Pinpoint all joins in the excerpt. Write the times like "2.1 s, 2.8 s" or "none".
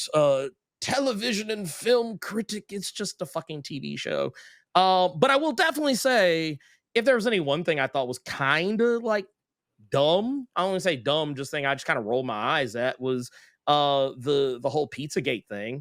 none

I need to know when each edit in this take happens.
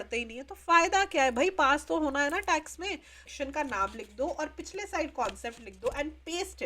3.3 s

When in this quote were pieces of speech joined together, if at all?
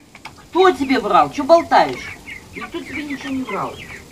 none

